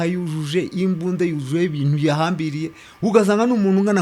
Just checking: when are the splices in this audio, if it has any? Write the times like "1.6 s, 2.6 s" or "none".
none